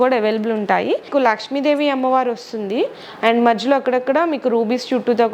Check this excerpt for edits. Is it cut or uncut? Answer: cut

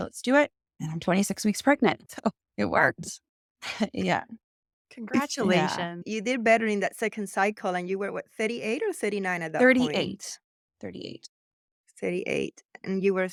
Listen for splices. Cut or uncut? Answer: uncut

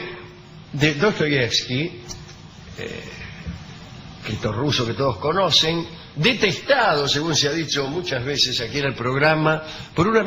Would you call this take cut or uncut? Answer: uncut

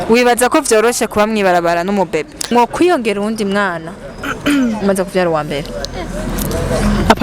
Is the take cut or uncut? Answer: cut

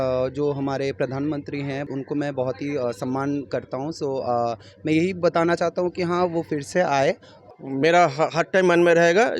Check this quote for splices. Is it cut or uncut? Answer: cut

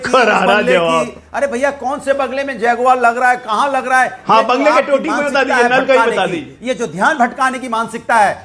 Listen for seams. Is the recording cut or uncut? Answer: uncut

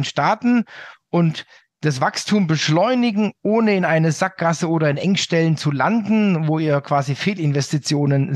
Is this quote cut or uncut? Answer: uncut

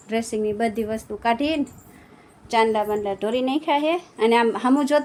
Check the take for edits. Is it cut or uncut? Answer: uncut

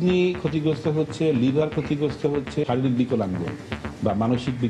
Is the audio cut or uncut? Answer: cut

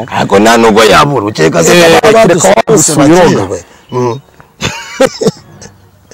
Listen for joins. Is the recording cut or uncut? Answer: uncut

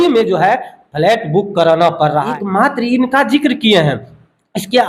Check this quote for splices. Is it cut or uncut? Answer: cut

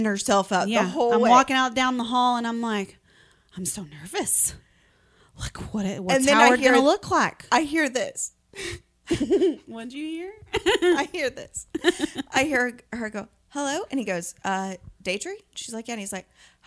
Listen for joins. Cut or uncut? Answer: uncut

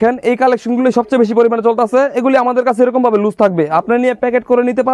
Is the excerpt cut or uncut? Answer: uncut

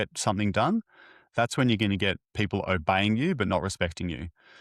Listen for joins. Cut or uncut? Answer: uncut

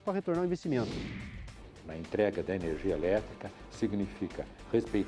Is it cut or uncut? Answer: cut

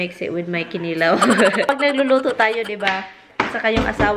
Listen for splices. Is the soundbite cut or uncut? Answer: cut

